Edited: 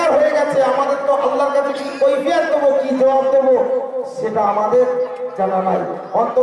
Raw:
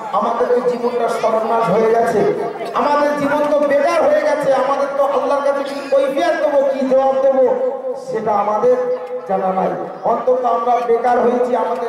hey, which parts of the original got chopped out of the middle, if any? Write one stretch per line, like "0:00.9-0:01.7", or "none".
none